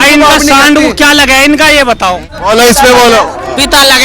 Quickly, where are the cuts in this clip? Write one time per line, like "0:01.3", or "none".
0:02.3